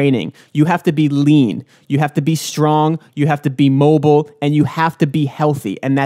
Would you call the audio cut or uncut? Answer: uncut